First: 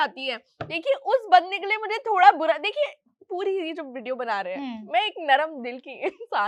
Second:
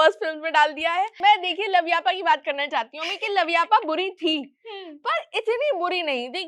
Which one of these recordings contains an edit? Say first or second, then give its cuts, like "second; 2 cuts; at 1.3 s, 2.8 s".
second; 1 cut; at 1.1 s